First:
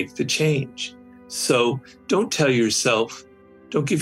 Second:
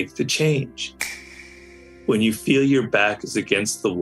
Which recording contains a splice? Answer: second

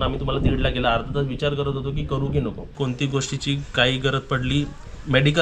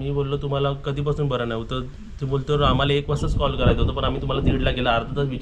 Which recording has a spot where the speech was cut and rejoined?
first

